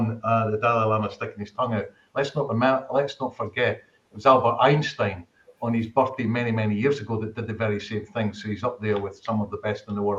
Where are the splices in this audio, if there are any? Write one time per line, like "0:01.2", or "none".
none